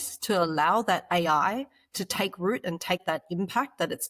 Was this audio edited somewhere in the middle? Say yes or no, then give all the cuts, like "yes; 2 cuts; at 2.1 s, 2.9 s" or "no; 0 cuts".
yes; 1 cut; at 3.0 s